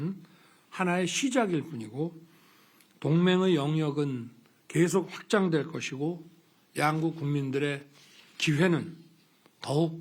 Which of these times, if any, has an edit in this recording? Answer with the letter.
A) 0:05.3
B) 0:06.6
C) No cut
C